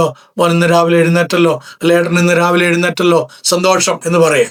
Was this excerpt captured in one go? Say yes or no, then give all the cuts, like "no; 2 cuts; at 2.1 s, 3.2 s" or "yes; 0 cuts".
yes; 0 cuts